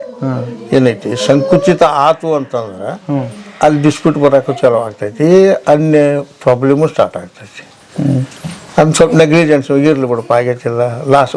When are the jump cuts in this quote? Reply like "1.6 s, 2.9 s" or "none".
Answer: none

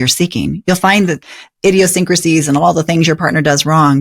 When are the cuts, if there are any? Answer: 1.3 s

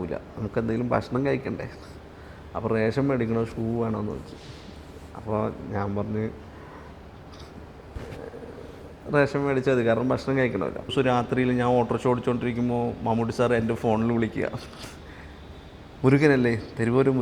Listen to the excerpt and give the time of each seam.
10.9 s

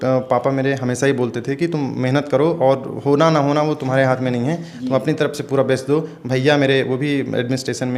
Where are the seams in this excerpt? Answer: none

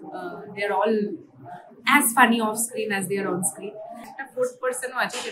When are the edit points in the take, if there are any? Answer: 4.2 s

